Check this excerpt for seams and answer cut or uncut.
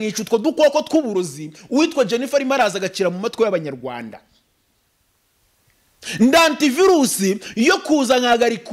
uncut